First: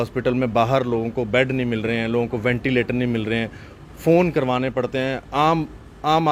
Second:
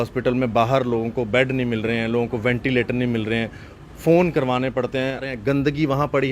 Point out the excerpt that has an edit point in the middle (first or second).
second